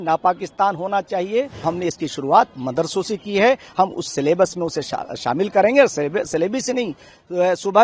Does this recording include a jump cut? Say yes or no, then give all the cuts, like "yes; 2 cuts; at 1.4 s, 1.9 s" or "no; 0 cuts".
yes; 1 cut; at 1.6 s